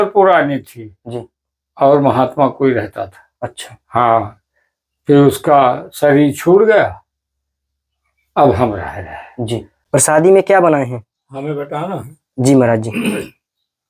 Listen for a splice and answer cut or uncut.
cut